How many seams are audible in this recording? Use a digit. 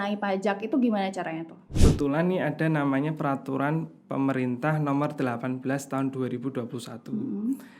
1